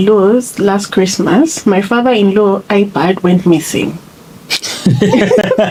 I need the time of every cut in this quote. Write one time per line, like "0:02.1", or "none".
none